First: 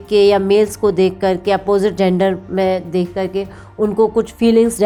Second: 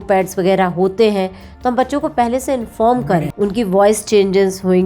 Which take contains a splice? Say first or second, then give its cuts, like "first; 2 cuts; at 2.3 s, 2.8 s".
second; 1 cut; at 3.2 s